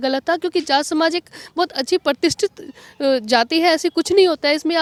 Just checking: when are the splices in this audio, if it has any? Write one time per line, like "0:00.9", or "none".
none